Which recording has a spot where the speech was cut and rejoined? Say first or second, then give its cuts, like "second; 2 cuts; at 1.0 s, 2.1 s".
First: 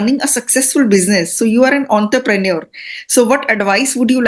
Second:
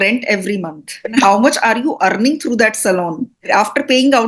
second; 1 cut; at 1.1 s